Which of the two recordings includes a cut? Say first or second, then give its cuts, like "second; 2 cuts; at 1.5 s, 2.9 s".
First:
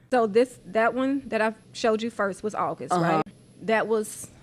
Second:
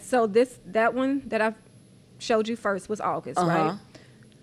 first; 2 cuts; at 1.7 s, 3.3 s